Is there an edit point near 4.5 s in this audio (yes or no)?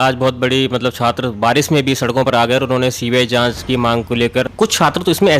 yes